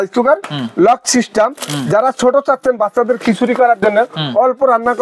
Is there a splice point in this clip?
no; 0 cuts

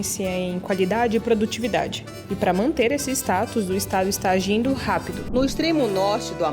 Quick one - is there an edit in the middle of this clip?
yes; 1 cut; at 5.2 s

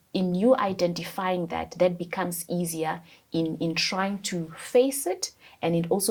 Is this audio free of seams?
yes; 0 cuts

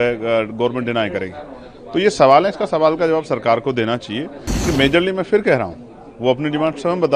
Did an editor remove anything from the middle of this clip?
yes; 1 cut; at 4.5 s

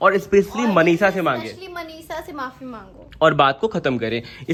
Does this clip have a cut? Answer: no; 0 cuts

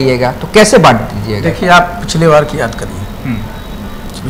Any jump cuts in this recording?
no; 0 cuts

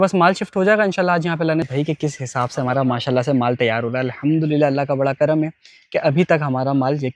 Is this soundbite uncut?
no; 1 cut; at 1.7 s

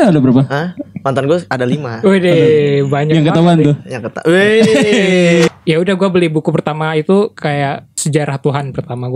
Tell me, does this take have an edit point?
yes; 2 cuts; at 5.5 s, 7.9 s

